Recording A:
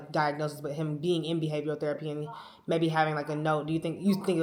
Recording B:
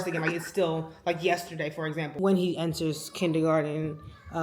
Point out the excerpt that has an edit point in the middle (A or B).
B